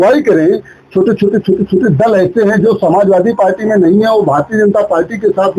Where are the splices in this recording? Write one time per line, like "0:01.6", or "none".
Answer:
none